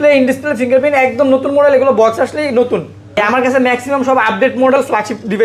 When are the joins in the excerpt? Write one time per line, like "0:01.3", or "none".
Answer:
0:03.2